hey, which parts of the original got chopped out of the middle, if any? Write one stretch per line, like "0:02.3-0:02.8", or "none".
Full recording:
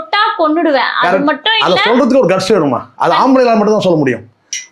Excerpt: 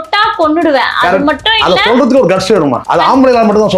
0:02.8-0:02.9